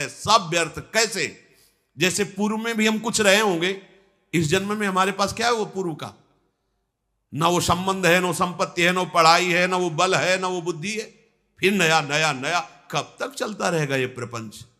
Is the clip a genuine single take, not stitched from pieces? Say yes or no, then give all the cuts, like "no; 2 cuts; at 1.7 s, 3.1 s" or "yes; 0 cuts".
yes; 0 cuts